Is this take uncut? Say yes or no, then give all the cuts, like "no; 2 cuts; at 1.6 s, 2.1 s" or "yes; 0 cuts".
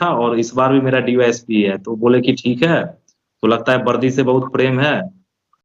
yes; 0 cuts